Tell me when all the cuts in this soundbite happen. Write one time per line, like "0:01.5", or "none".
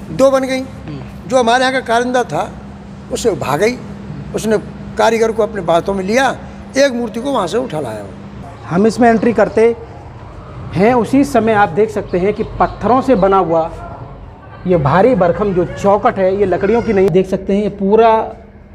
0:08.5
0:17.1